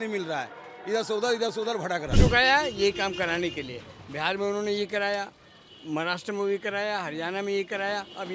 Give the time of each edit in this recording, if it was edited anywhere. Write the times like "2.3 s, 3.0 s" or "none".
2.2 s